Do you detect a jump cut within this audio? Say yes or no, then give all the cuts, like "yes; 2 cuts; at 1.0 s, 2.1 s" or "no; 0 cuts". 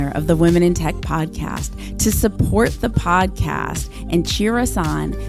no; 0 cuts